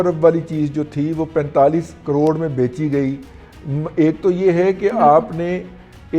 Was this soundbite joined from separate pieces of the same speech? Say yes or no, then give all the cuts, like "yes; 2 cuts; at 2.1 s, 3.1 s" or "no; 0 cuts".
no; 0 cuts